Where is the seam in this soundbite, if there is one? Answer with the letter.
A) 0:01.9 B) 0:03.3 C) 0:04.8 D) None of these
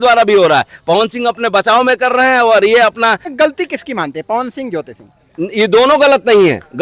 B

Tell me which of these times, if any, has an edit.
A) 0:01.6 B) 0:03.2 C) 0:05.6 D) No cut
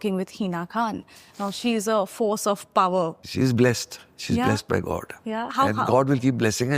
B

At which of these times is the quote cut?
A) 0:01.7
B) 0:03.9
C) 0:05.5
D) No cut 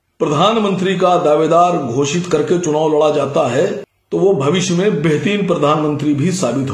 B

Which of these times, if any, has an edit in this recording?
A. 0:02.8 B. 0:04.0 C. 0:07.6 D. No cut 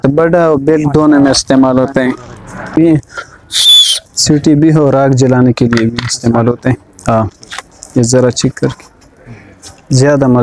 A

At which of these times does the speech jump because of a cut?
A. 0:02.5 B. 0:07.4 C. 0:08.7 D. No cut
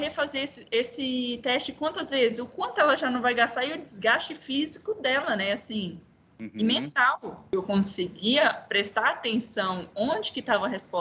B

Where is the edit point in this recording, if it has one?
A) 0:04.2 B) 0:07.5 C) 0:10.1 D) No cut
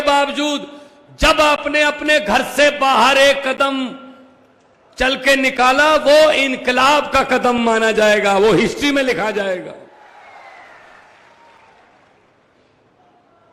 C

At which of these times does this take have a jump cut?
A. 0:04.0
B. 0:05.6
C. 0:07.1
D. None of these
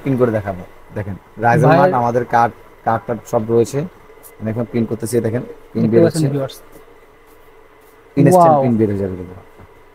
D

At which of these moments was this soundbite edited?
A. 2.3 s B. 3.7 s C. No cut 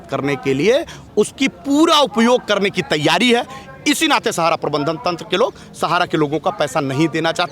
C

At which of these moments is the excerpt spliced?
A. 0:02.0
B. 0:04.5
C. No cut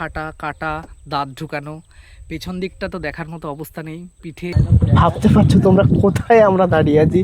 B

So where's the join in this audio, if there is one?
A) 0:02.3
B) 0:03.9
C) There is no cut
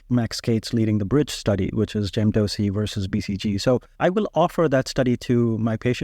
B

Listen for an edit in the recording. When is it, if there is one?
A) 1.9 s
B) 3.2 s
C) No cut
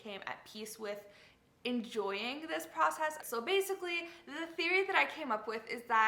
B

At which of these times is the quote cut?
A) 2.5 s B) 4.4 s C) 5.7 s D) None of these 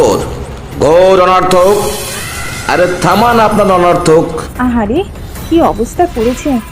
B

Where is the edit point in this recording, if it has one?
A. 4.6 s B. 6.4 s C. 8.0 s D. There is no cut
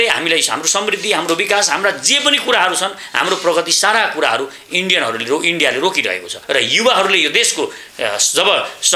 B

